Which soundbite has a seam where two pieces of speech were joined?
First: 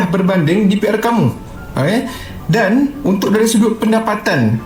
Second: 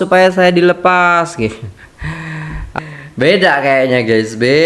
second; 1 cut; at 2.8 s

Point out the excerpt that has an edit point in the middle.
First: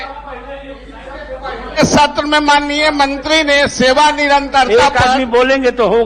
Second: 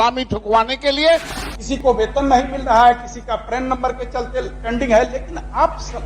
second; 1 cut; at 1.3 s

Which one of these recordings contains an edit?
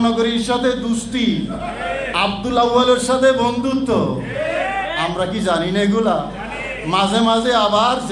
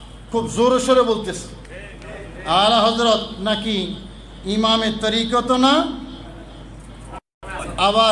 first; 2 cuts; at 1.9 s, 4.9 s

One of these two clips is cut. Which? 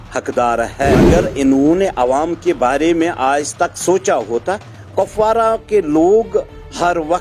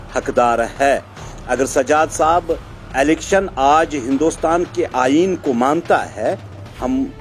first; 1 cut; at 1.0 s

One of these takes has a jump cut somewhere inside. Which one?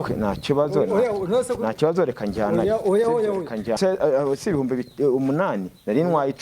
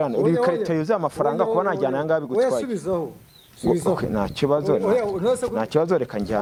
first; 1 cut; at 3.8 s

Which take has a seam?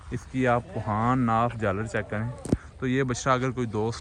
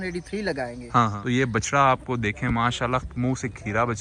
second; 1 cut; at 1.1 s

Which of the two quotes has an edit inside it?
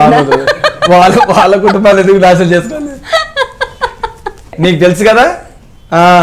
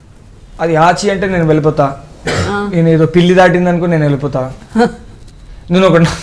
first; 1 cut; at 4.5 s

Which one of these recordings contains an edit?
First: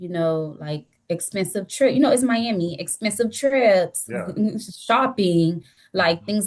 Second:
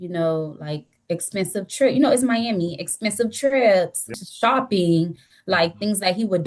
second; 1 cut; at 4.2 s

